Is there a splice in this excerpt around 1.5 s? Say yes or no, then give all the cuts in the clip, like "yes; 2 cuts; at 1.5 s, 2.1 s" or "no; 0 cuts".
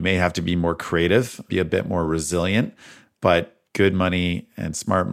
yes; 1 cut; at 1.5 s